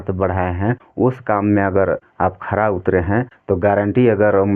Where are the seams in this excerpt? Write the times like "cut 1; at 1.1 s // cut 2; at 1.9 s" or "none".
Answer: cut 1; at 0.8 s // cut 2; at 2.1 s // cut 3; at 3.3 s

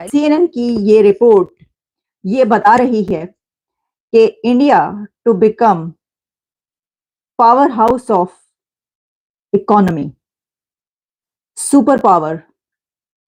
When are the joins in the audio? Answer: none

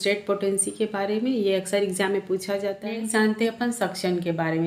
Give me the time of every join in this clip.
cut 1; at 2.8 s

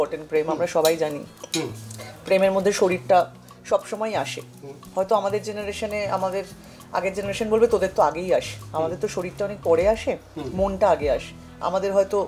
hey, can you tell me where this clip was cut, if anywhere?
none

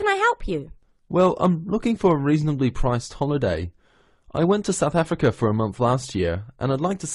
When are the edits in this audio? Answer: none

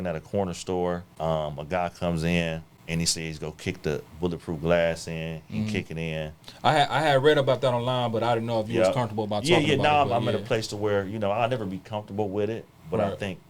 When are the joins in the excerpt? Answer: cut 1; at 1.1 s // cut 2; at 2.7 s

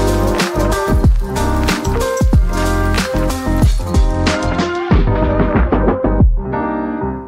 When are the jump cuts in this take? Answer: none

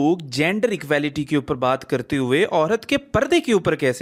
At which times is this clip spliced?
none

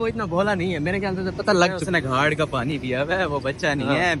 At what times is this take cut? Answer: none

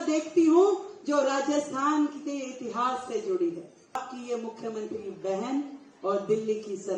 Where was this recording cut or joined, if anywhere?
cut 1; at 4.0 s

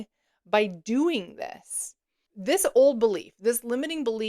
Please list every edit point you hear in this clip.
cut 1; at 2.3 s

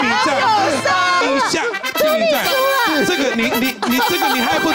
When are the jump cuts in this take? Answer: cut 1; at 1.2 s

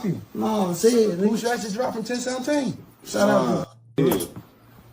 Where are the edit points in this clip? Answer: cut 1; at 3.2 s

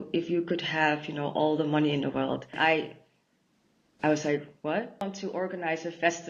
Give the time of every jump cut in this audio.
cut 1; at 2.5 s // cut 2; at 5.0 s

